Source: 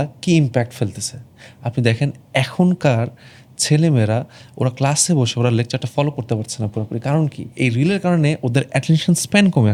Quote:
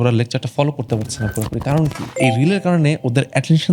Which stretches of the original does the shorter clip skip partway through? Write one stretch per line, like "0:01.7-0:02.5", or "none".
none